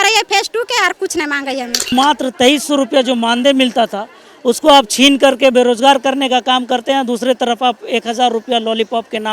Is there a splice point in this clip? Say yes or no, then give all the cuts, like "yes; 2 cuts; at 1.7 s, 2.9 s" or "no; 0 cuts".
yes; 1 cut; at 1.9 s